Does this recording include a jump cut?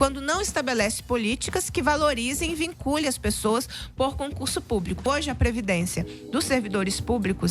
yes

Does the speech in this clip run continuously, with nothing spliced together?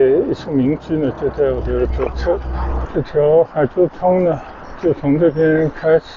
no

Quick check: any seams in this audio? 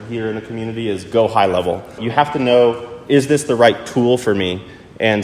yes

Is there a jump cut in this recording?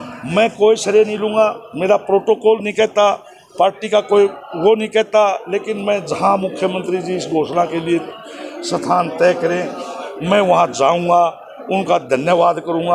no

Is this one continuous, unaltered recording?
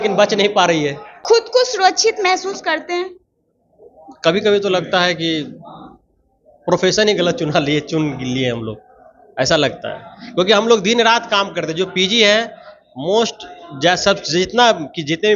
no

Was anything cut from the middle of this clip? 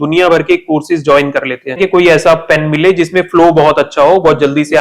yes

